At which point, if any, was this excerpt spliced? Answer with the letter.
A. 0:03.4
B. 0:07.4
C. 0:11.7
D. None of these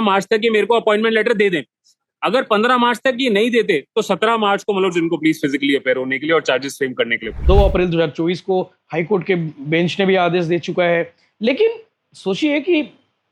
B